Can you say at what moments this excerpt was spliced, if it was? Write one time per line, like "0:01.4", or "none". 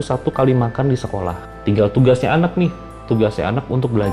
0:01.5